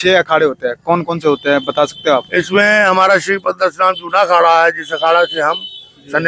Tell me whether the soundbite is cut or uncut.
uncut